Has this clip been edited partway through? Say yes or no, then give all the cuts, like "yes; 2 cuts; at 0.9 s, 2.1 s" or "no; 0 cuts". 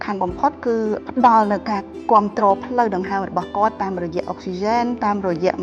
yes; 1 cut; at 1.0 s